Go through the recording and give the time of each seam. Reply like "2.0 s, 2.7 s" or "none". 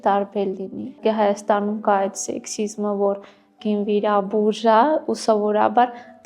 1.0 s